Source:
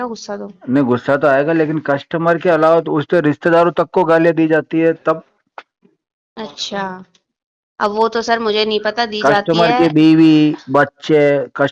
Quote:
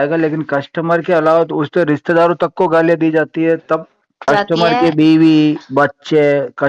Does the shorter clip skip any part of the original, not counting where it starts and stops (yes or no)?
yes